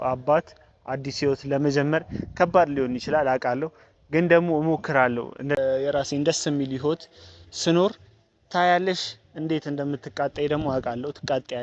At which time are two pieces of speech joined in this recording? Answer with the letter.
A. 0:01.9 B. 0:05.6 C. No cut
B